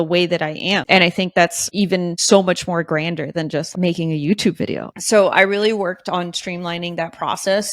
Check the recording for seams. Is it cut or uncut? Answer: cut